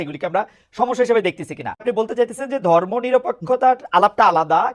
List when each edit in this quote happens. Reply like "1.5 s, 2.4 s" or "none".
1.8 s

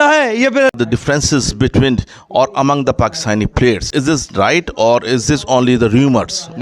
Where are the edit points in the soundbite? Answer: 0.7 s, 3.9 s

